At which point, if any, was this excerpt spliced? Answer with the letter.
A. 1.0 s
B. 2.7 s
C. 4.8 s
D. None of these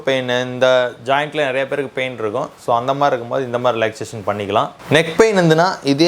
C